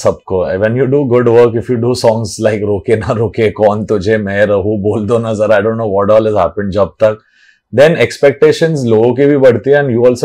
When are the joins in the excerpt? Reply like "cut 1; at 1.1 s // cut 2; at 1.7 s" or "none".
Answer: none